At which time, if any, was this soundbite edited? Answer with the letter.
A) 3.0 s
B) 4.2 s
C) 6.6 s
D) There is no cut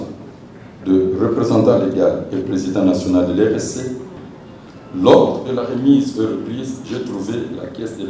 B